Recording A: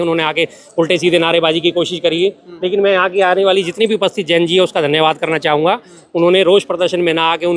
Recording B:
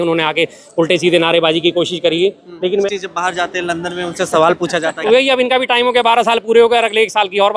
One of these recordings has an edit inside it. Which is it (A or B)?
B